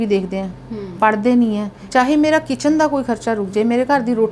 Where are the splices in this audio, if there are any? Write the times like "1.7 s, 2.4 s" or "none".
1.8 s